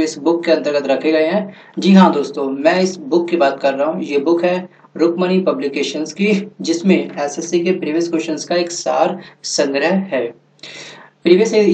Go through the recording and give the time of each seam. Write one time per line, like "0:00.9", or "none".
0:05.6